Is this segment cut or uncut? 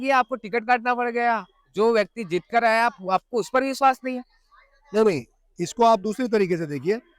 uncut